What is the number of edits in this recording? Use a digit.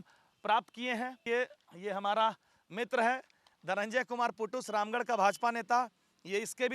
1